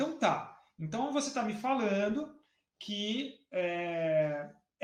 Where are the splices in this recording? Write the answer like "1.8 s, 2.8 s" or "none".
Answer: none